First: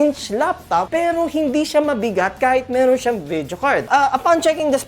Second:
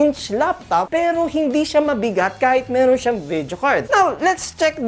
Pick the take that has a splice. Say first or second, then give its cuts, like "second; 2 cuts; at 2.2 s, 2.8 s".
first; 1 cut; at 3.8 s